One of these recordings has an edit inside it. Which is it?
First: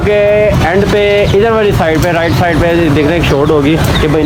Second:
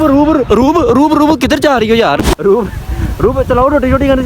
second; 1 cut; at 2.2 s

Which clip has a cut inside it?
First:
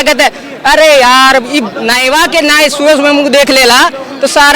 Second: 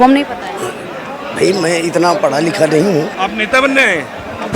second; 1 cut; at 3.1 s

